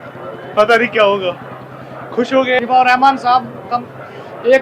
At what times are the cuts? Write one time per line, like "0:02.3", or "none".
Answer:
0:02.6